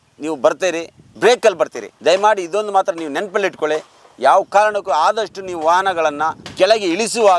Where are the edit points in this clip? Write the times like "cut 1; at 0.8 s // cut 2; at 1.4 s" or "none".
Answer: cut 1; at 1.0 s // cut 2; at 1.9 s // cut 3; at 6.4 s